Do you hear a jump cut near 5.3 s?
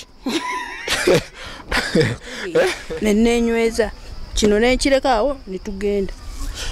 no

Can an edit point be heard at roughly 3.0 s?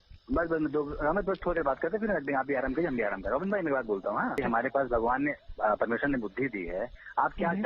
no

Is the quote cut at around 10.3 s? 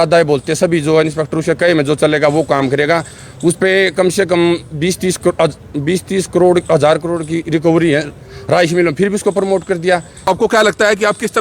yes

